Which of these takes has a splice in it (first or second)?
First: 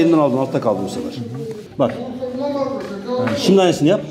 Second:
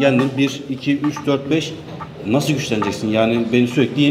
first